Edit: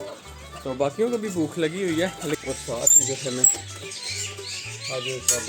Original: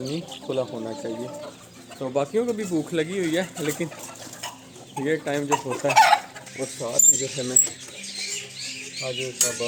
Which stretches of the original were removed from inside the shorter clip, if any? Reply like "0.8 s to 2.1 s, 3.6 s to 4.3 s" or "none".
3.7 s to 6.5 s